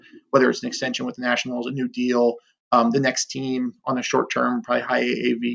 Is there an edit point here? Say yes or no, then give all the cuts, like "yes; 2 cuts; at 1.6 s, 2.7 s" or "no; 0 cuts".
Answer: no; 0 cuts